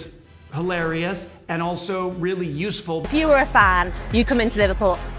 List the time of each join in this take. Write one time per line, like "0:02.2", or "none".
0:03.0